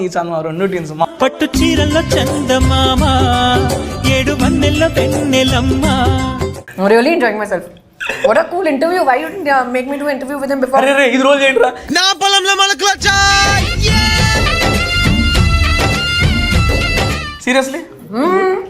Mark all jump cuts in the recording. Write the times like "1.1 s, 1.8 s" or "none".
1.1 s, 6.6 s